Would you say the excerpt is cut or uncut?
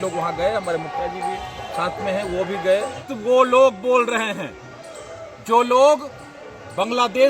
cut